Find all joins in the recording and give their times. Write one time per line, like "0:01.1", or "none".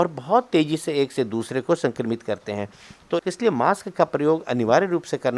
0:03.2